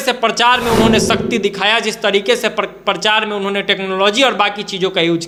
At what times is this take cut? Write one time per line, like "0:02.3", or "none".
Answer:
none